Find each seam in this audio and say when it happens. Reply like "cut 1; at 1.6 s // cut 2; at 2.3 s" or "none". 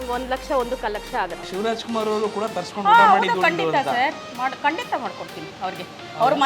cut 1; at 1.4 s

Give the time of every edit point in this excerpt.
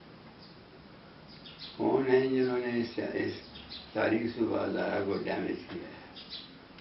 none

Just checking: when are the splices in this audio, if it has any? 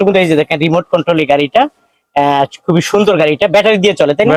none

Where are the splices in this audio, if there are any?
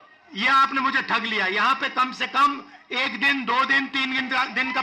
none

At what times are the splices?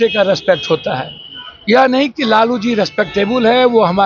none

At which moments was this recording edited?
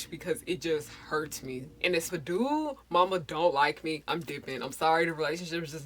cut 1; at 2.1 s

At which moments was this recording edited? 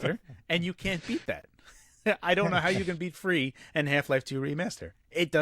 none

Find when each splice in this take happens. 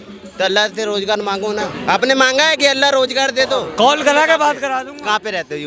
cut 1; at 1.7 s // cut 2; at 3.7 s

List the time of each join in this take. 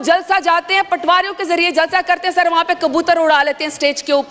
none

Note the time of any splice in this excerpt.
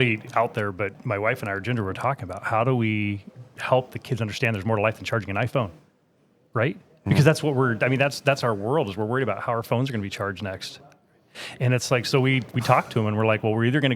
cut 1; at 1.0 s

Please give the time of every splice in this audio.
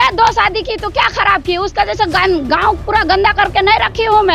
none

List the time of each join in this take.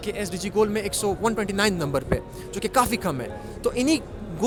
none

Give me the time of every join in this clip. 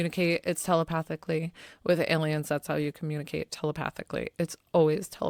none

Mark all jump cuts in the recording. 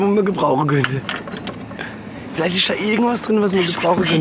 none

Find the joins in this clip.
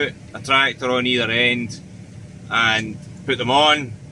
none

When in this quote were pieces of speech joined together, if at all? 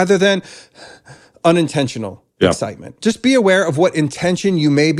cut 1; at 3.0 s

